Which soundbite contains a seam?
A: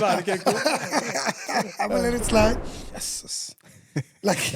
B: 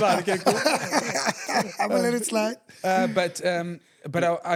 A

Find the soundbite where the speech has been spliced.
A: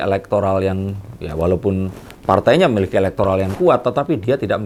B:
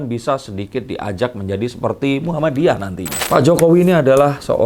B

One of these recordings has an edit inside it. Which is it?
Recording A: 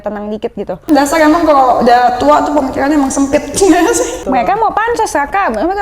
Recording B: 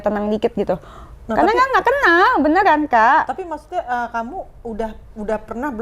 A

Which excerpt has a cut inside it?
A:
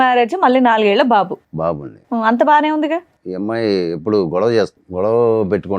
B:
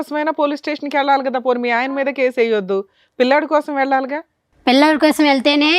A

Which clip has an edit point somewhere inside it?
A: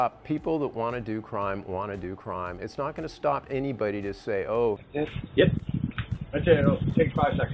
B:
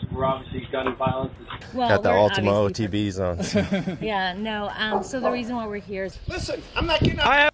B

